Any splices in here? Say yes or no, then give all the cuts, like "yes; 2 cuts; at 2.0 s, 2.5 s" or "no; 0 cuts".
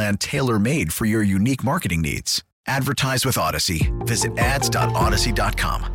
no; 0 cuts